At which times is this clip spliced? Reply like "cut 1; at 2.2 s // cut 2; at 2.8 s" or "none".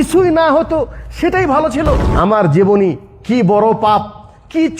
cut 1; at 2.1 s